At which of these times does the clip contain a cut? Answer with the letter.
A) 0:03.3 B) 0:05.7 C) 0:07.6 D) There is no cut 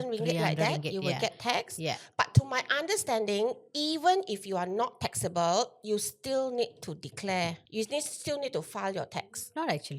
C